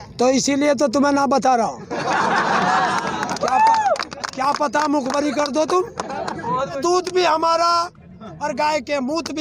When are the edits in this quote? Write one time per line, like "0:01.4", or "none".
0:06.8